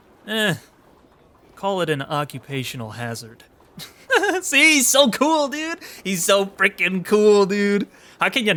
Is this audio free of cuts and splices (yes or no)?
yes